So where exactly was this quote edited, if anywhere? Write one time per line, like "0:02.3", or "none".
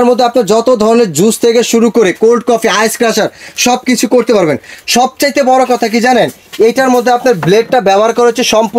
none